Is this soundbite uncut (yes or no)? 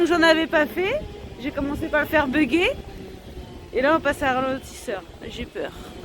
yes